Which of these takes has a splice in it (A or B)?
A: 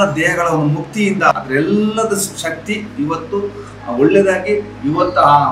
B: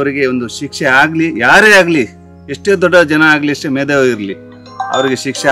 A